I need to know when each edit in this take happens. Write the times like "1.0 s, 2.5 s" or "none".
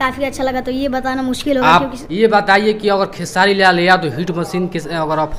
2.0 s